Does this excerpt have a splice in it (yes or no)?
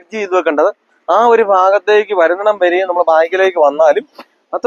no